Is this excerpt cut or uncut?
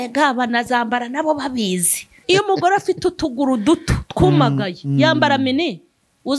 cut